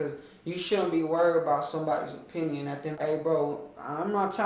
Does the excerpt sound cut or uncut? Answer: cut